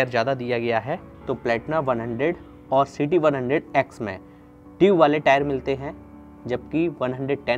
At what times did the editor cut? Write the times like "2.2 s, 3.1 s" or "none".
1.1 s